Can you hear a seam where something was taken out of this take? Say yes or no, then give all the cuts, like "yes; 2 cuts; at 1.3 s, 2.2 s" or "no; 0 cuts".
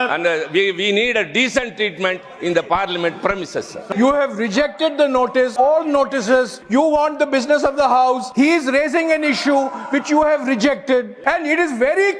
yes; 5 cuts; at 3.8 s, 5.5 s, 6.6 s, 8.3 s, 11.1 s